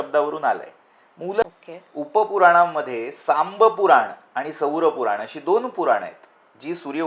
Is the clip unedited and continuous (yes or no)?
no